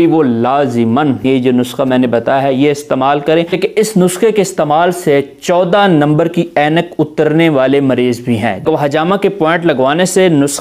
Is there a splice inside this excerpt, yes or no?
yes